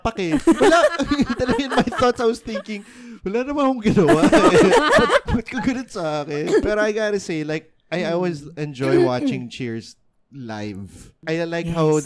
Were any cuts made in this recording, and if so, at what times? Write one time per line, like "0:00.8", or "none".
0:06.6
0:11.1